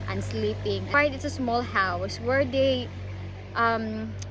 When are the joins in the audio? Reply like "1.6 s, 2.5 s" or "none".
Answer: 0.9 s

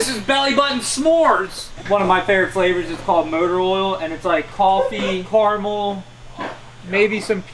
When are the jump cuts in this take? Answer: 1.7 s, 5.2 s

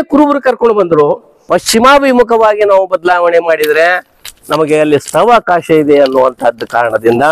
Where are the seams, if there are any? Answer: 1.3 s

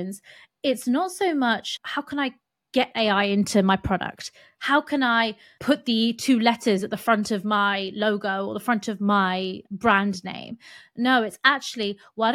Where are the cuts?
1.7 s, 5.5 s, 9.6 s

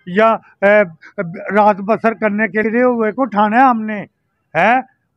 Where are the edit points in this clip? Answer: 2.5 s

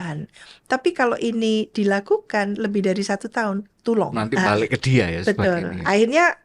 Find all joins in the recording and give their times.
4.2 s

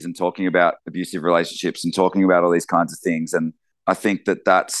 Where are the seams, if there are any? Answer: 3.7 s

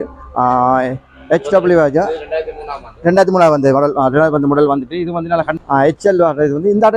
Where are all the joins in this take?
5.6 s

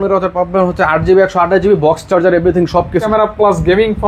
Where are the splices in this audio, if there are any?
3.0 s

